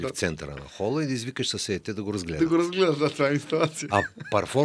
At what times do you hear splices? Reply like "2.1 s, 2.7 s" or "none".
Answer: none